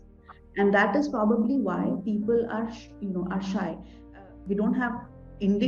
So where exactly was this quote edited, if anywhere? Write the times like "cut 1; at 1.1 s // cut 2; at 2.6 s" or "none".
cut 1; at 4.2 s